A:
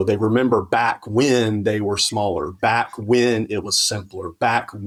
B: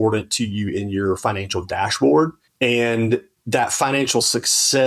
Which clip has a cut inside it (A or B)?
B